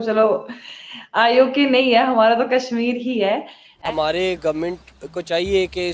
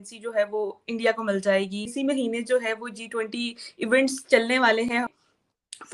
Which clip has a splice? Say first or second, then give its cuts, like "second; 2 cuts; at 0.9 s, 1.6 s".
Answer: first; 1 cut; at 3.8 s